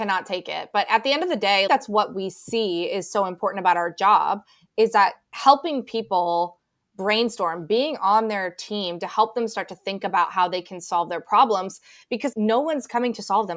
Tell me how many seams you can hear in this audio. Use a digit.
2